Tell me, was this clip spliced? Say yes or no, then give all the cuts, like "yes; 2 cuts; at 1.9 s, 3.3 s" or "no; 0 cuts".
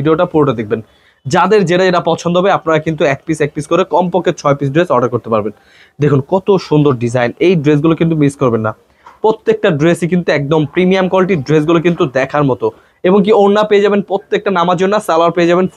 no; 0 cuts